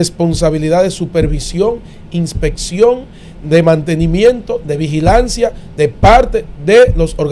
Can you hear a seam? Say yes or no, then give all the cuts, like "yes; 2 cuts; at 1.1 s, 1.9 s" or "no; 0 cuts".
no; 0 cuts